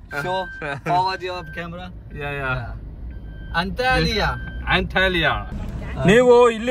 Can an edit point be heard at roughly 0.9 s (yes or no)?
no